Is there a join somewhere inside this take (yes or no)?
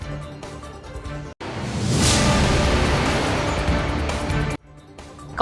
no